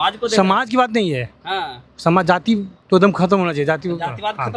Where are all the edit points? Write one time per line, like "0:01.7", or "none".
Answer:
0:02.7